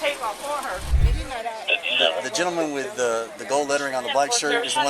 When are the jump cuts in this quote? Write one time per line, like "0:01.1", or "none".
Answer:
0:01.0